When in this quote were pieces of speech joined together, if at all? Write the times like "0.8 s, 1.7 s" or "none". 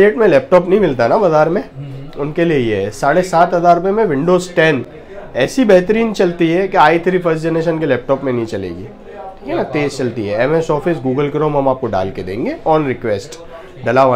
none